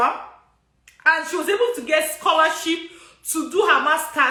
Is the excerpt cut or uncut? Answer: uncut